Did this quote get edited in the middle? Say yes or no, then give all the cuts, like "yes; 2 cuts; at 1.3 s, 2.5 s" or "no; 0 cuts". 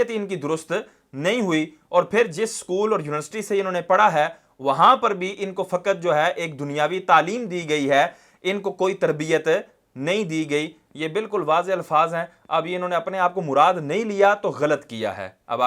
no; 0 cuts